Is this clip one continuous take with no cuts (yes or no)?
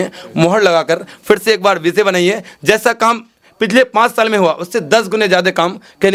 yes